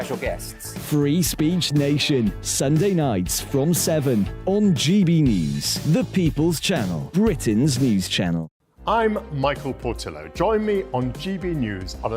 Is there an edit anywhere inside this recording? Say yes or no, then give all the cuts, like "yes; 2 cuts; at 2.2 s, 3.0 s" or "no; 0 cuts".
yes; 1 cut; at 8.5 s